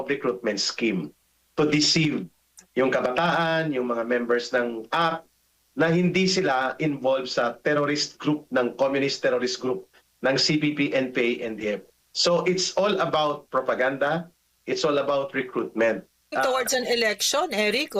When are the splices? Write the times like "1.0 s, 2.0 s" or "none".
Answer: 16.3 s